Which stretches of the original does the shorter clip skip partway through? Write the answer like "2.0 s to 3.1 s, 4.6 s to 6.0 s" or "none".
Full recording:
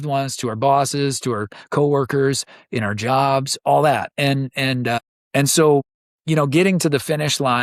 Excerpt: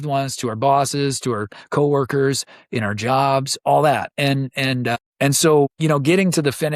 5.1 s to 5.2 s, 5.9 s to 6.2 s